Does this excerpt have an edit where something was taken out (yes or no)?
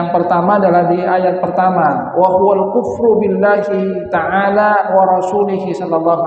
no